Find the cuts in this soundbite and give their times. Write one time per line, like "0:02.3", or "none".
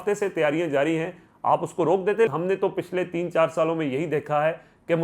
0:02.3